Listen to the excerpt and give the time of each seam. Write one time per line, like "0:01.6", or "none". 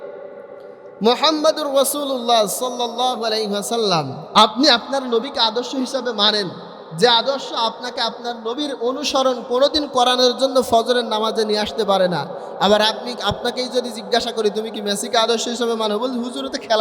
0:04.2